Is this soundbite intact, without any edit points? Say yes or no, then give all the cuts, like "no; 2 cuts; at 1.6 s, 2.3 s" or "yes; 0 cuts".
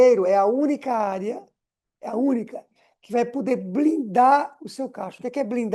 yes; 0 cuts